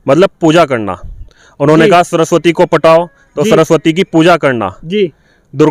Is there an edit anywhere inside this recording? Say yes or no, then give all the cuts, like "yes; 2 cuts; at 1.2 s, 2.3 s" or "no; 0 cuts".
no; 0 cuts